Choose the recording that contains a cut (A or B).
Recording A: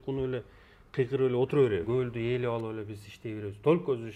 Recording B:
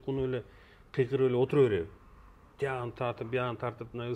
A